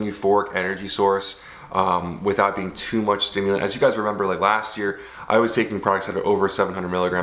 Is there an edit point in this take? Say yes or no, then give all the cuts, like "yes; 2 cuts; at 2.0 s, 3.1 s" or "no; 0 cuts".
no; 0 cuts